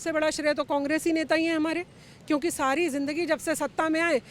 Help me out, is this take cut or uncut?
uncut